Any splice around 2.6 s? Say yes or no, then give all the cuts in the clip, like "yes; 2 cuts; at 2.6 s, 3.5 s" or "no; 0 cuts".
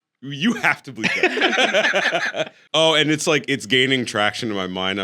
yes; 1 cut; at 2.6 s